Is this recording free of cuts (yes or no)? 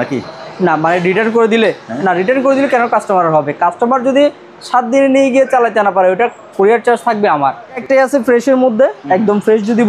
no